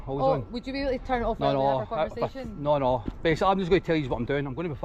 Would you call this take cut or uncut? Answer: uncut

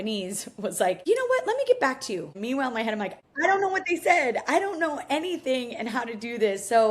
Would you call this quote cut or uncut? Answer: cut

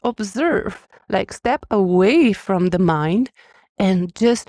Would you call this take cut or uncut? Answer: uncut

